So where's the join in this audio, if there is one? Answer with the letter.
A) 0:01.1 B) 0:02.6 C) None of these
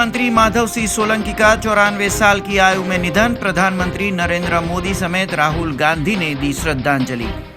C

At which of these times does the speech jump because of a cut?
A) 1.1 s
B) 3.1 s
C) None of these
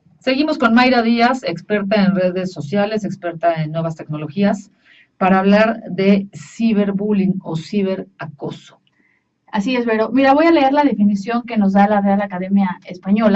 B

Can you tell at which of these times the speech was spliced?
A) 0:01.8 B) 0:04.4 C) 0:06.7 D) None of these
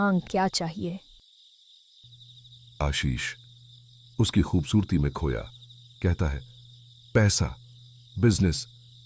D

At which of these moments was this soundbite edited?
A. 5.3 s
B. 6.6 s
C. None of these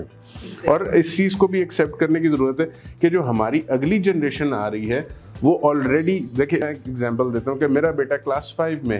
B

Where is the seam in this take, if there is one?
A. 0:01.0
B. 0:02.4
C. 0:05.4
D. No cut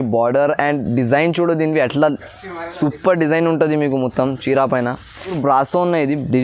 C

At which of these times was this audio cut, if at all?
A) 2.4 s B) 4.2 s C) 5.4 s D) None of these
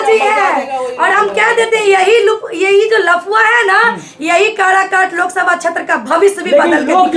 D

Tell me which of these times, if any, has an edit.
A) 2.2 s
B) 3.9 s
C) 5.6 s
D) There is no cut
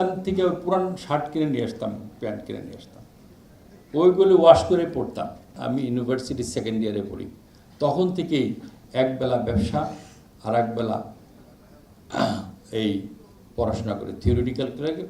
C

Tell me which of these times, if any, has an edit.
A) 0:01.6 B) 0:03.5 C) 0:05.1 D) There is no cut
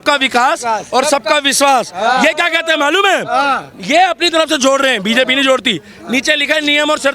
D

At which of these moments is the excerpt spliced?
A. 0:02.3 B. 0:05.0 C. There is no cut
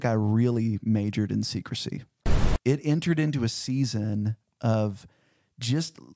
A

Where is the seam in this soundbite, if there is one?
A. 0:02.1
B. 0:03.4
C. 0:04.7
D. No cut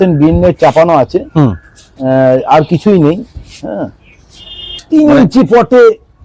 C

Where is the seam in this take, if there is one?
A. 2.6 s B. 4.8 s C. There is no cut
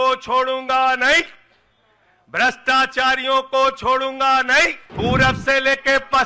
B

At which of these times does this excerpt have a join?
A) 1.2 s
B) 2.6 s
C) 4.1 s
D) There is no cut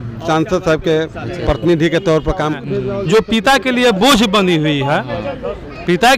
B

